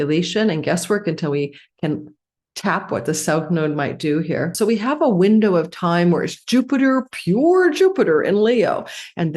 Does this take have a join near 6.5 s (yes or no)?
no